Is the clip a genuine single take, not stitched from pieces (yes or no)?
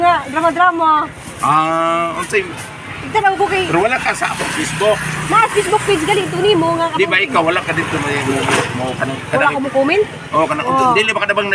yes